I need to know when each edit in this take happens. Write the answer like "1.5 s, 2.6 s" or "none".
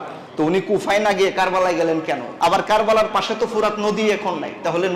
2.3 s